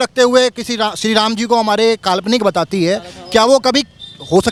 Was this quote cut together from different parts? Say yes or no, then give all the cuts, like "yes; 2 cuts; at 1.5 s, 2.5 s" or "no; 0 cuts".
no; 0 cuts